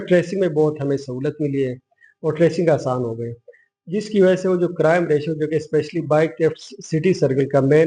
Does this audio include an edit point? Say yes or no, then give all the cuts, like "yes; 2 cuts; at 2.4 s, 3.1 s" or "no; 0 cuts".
no; 0 cuts